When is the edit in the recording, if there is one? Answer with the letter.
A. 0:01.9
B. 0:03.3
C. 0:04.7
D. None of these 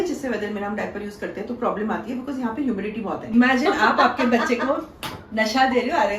B